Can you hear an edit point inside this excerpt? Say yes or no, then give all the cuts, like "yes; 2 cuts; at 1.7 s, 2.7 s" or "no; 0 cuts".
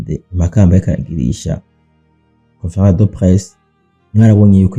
no; 0 cuts